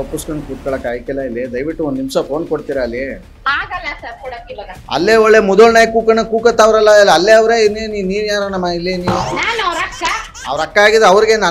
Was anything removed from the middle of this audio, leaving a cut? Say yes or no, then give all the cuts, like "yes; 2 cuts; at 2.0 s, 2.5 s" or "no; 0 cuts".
yes; 3 cuts; at 4.8 s, 9.2 s, 10.3 s